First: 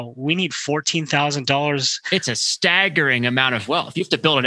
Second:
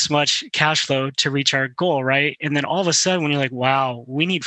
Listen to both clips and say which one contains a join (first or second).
first